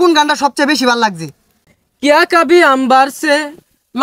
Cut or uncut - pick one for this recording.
cut